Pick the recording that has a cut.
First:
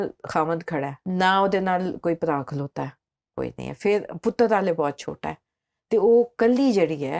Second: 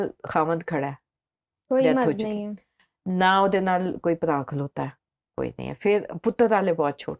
first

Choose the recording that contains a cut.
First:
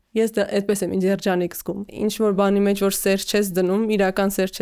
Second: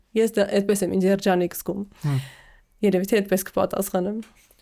first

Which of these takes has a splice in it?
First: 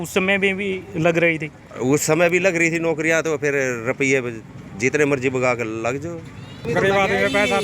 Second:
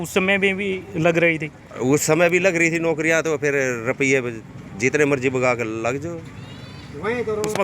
first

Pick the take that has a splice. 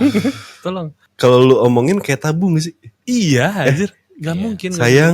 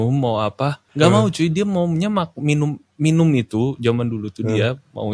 first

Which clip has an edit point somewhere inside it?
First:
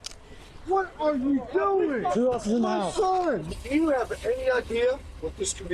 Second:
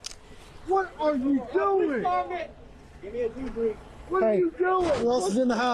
first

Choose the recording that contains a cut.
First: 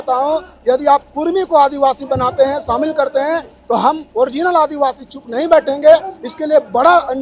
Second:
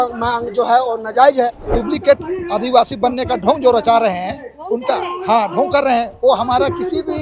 second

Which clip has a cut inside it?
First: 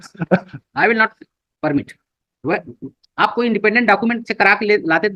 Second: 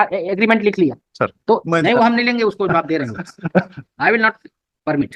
second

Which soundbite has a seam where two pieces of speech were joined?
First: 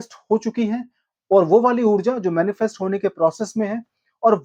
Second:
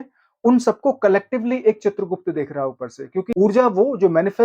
second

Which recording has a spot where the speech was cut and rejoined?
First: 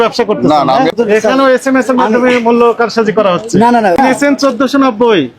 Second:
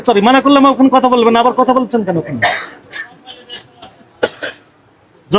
first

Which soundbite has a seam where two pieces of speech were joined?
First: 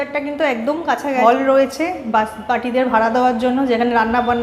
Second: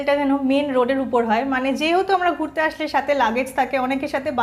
first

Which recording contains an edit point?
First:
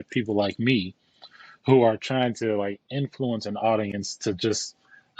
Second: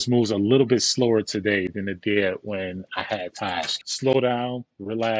second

